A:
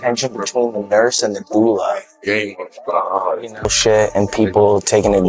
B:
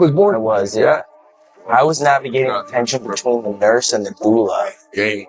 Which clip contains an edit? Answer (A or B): A